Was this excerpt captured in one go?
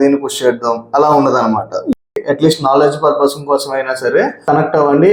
no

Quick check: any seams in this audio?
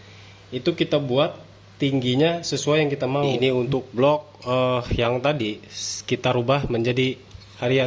yes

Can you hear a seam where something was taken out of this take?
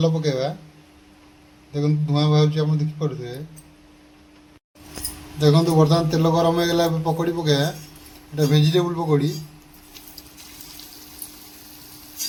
no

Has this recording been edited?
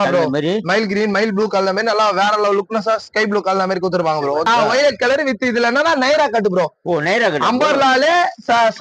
yes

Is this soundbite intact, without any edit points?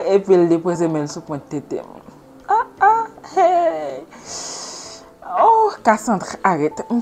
yes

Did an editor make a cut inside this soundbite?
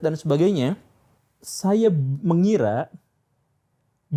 no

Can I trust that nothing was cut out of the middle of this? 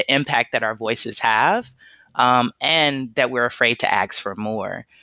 yes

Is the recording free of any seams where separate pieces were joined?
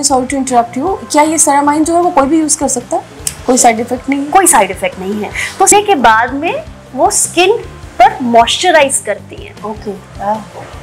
no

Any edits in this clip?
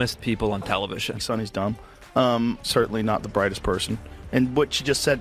no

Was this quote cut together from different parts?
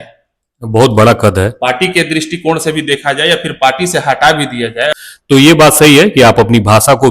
yes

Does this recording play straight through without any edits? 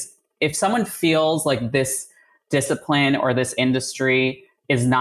yes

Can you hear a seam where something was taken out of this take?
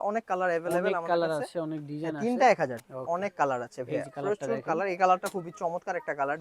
yes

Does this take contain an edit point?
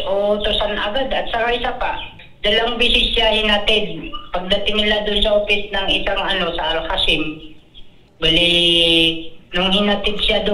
yes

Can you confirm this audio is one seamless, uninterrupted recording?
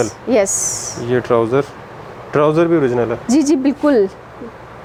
yes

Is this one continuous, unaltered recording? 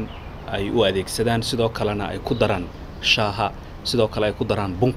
yes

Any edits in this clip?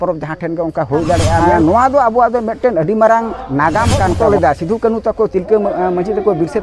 yes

